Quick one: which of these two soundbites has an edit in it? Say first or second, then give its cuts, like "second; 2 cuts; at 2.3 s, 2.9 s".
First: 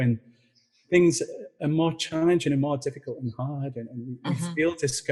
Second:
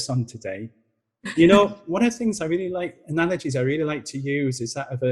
second; 1 cut; at 1.3 s